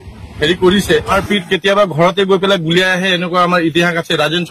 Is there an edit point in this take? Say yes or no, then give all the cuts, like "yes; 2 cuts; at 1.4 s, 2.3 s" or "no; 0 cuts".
yes; 1 cut; at 1.1 s